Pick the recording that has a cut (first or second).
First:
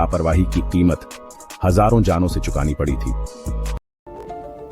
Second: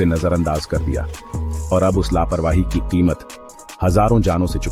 first